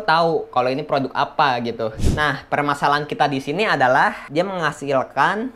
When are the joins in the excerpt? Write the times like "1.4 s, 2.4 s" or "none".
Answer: 2.1 s, 4.2 s